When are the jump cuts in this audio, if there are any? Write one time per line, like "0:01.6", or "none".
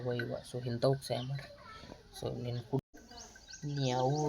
0:02.8